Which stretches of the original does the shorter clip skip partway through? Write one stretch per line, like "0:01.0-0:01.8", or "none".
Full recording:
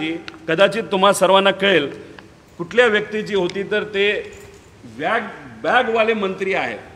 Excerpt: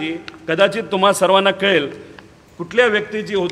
none